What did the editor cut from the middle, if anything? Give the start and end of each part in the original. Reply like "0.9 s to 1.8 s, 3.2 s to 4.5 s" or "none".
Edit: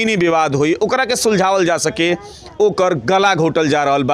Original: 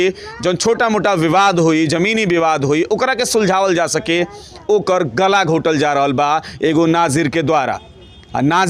none